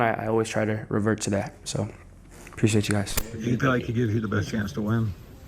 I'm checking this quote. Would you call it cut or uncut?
cut